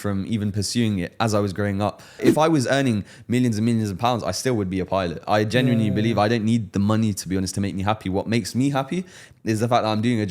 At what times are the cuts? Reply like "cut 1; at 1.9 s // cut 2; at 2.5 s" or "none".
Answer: cut 1; at 2.2 s